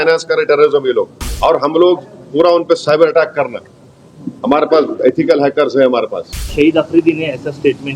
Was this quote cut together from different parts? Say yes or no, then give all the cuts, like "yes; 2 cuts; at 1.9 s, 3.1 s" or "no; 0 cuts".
yes; 2 cuts; at 1.2 s, 6.4 s